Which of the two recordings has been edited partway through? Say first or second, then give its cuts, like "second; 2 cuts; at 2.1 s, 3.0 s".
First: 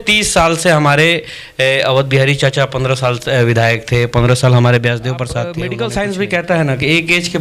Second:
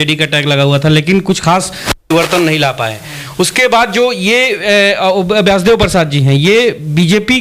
first; 1 cut; at 5.6 s